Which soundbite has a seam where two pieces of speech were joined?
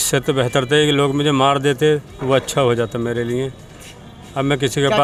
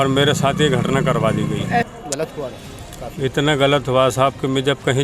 second; 1 cut; at 1.9 s

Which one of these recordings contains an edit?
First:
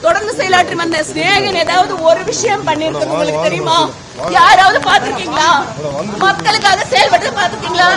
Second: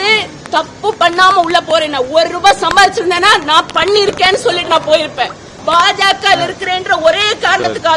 second; 1 cut; at 5.5 s

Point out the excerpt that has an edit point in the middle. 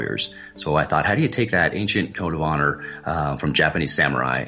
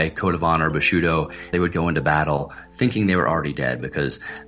second; 1 cut; at 1.5 s

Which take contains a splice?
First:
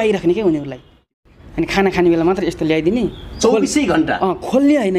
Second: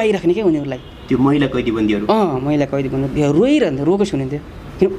first; 1 cut; at 1.1 s

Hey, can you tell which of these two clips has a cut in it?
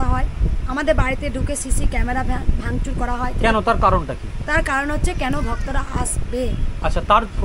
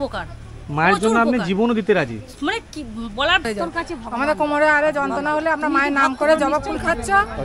second; 1 cut; at 3.5 s

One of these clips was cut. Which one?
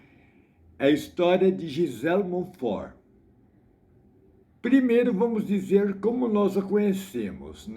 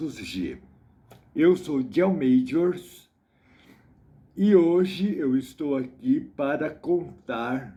first; 1 cut; at 4.4 s

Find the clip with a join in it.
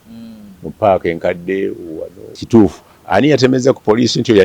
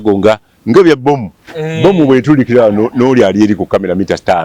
first; 1 cut; at 2.4 s

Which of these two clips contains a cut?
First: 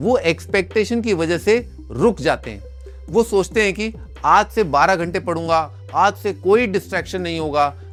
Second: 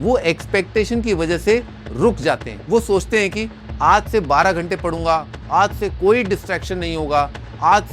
second; 1 cut; at 2.5 s

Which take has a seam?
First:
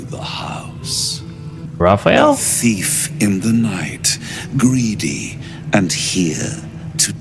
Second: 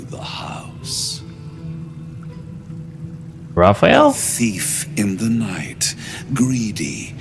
first; 1 cut; at 1.6 s

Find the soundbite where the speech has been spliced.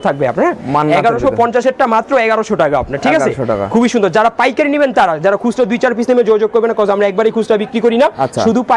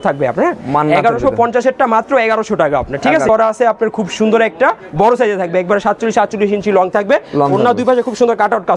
second; 1 cut; at 3.3 s

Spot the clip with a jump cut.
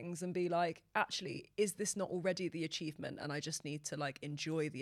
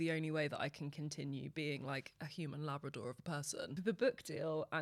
second; 1 cut; at 3.8 s

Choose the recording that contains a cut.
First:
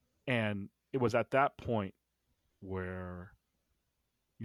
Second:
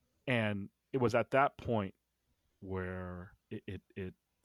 second; 1 cut; at 3.4 s

